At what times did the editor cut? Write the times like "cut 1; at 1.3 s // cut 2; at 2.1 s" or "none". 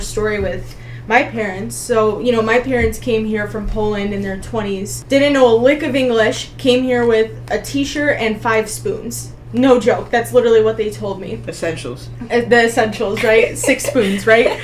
cut 1; at 4.9 s

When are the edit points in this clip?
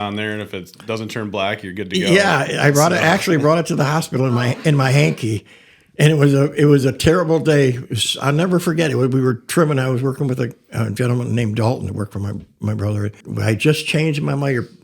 cut 1; at 13.2 s

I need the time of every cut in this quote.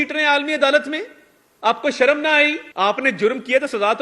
cut 1; at 2.6 s

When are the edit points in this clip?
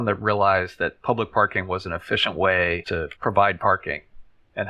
cut 1; at 2.9 s

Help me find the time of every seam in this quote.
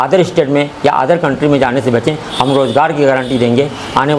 none

